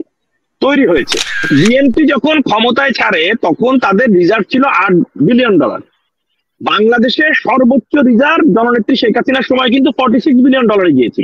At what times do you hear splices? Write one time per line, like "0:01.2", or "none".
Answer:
0:01.4